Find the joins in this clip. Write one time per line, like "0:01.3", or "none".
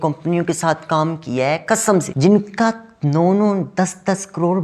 0:02.1